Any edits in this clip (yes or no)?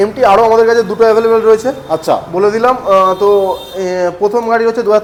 no